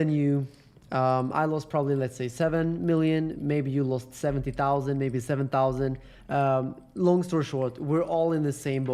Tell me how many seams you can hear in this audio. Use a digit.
0